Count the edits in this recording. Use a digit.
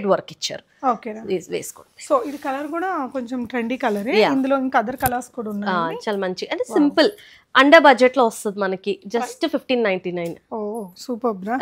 0